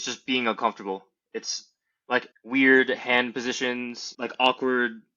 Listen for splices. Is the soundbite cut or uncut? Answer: cut